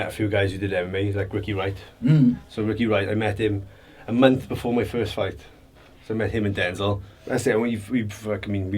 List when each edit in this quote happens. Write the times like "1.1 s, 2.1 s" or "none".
7.1 s